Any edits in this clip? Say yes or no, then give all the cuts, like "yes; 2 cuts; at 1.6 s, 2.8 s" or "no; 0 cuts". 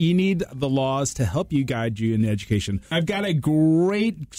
yes; 1 cut; at 2.9 s